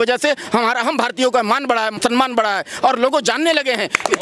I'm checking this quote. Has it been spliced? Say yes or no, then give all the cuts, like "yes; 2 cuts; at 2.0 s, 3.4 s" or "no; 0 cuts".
yes; 1 cut; at 1.9 s